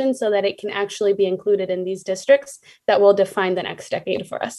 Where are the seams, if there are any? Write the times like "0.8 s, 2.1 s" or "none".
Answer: none